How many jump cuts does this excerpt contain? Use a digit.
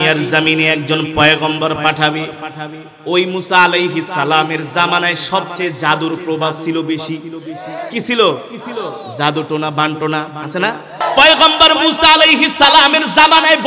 1